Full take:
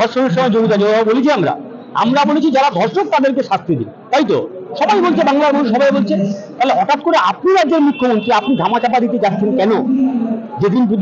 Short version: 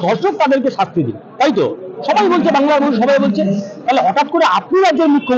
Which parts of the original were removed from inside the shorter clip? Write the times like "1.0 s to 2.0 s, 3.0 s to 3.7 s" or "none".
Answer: none